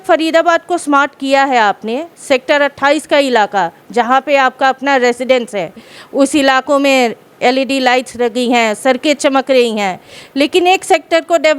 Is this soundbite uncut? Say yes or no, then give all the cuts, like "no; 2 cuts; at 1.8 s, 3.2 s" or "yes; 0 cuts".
yes; 0 cuts